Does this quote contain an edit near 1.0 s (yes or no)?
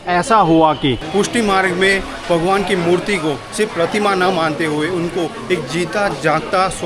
yes